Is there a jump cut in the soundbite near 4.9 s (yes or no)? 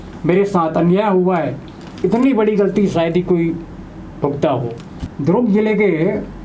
no